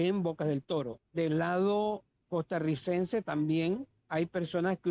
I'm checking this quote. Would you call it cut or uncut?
cut